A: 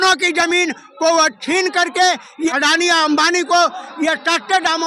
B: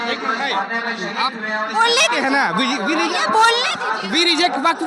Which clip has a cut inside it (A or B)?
A